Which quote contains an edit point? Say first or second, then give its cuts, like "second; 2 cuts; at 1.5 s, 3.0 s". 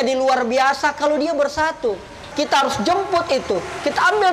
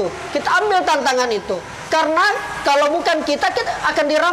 first; 1 cut; at 2.2 s